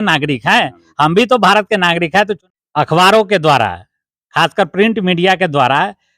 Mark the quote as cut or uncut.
cut